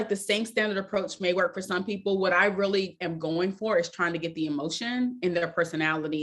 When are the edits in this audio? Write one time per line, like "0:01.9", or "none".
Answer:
none